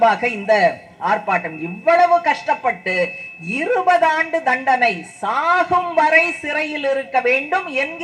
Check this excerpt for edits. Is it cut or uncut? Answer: uncut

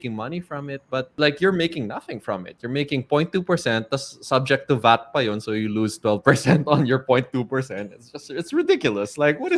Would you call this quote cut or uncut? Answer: cut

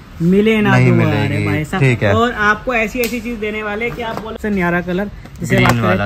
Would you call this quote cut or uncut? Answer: cut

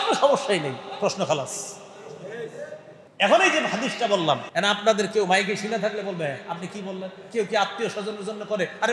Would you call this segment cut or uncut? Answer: cut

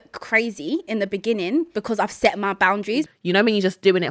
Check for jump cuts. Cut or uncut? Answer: cut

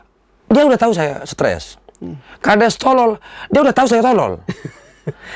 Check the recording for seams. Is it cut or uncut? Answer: uncut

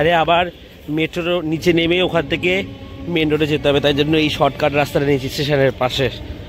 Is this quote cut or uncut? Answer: uncut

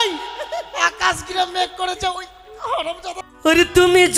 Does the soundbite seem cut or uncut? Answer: cut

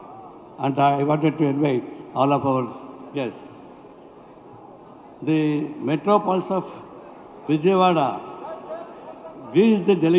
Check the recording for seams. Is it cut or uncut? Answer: uncut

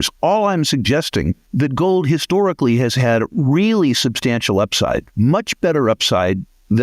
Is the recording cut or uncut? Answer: cut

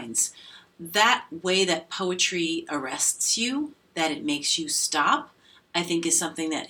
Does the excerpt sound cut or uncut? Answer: uncut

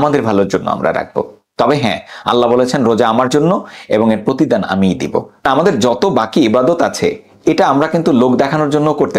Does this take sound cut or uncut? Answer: uncut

